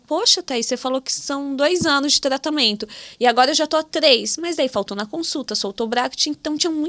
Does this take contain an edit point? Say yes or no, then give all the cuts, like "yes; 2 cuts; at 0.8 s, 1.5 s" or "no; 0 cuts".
no; 0 cuts